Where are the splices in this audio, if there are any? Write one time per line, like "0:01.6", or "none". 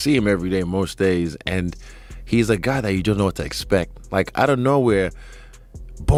none